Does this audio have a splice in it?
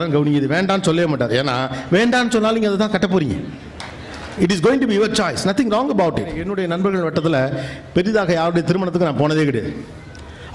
yes; 1 cut; at 6.4 s

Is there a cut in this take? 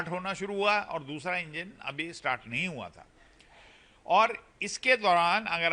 no; 0 cuts

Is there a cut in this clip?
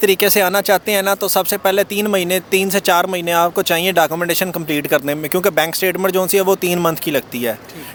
no; 0 cuts

